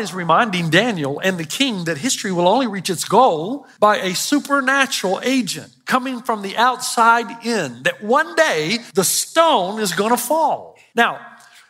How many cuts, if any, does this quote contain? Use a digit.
3